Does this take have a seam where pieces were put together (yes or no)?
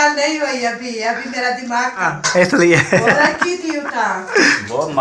yes